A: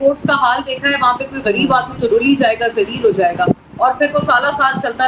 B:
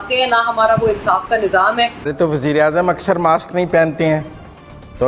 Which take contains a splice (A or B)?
B